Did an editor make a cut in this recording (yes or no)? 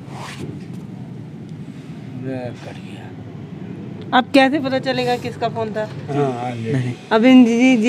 yes